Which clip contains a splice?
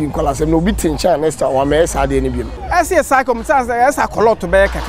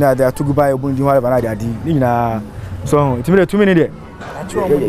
first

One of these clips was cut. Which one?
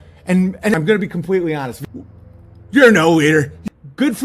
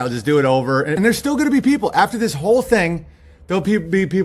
second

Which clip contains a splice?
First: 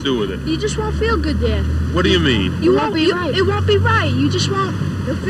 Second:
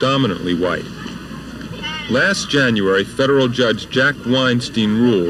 first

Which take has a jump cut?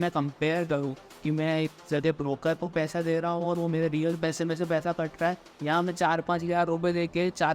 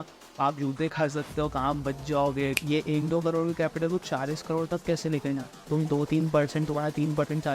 second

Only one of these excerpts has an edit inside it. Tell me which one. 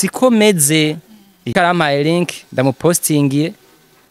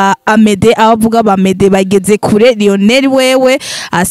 first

